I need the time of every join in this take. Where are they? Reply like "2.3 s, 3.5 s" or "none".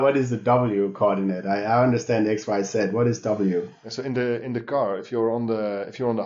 3.8 s